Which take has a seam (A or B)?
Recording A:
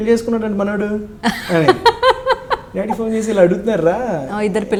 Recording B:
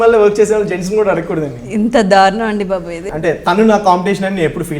B